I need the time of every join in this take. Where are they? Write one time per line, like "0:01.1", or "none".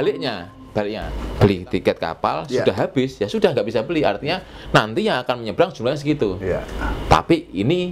0:01.2